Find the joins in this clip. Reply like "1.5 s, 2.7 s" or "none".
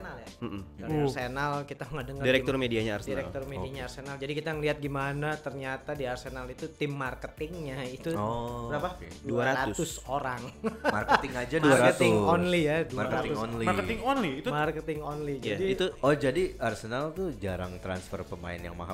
none